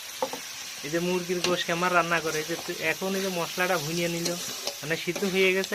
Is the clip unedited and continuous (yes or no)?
yes